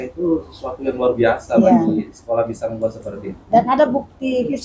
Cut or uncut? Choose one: uncut